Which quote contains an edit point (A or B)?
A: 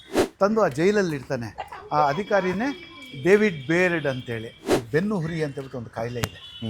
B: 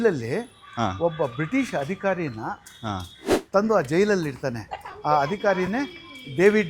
A